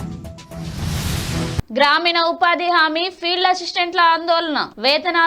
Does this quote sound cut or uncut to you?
uncut